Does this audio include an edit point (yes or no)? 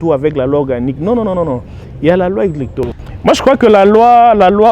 yes